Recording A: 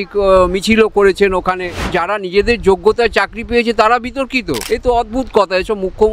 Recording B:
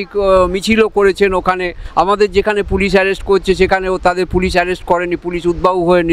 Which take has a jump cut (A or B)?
A